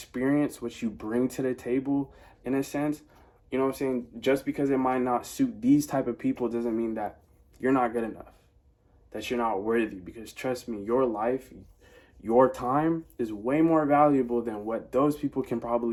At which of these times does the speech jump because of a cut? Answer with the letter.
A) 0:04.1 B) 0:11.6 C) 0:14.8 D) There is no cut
D